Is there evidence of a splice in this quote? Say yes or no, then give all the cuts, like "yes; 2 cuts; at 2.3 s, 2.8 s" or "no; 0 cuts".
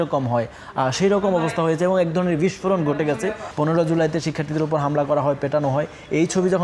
yes; 1 cut; at 3.4 s